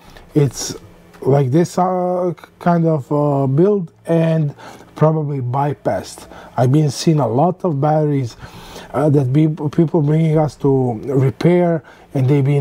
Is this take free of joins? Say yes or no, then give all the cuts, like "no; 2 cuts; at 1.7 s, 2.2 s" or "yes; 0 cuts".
yes; 0 cuts